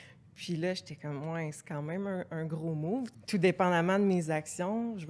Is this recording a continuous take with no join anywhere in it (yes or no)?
no